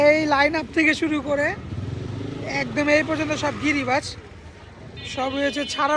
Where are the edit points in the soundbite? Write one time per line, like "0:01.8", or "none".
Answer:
none